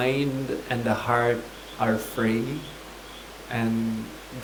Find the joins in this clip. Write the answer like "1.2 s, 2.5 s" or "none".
none